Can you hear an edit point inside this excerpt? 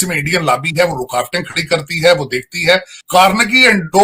yes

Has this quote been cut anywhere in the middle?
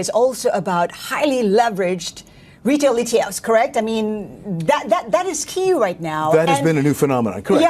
no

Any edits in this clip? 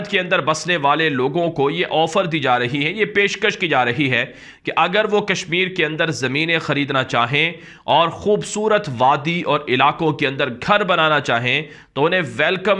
no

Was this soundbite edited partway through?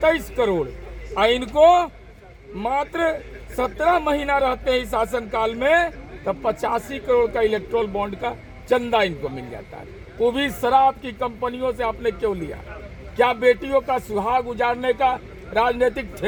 no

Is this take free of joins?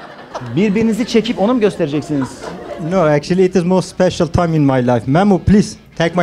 yes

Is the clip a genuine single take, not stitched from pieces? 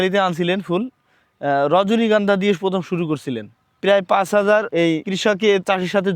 no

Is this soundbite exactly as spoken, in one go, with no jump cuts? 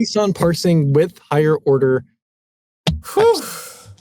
yes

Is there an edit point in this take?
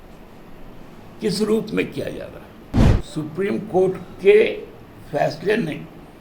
yes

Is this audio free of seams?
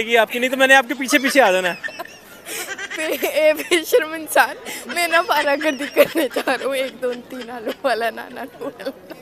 yes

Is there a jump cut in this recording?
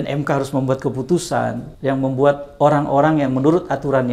yes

